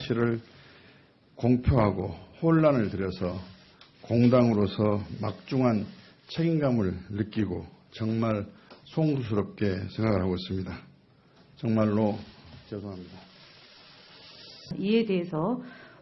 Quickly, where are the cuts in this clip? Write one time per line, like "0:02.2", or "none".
0:04.6